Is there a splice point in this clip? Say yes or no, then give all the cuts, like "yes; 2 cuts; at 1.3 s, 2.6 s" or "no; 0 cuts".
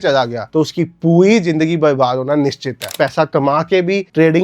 yes; 1 cut; at 2.9 s